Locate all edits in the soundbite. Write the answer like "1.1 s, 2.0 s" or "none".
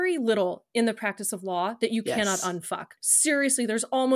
2.9 s